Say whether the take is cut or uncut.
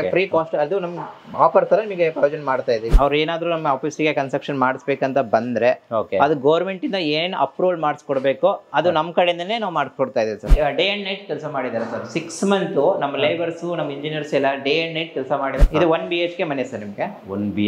cut